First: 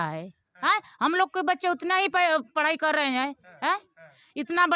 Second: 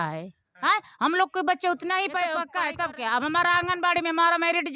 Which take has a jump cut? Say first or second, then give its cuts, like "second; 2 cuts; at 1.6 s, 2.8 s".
second; 1 cut; at 2.4 s